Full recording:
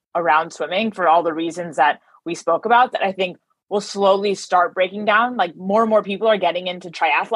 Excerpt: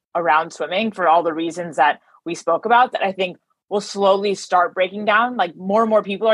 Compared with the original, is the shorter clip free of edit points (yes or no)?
yes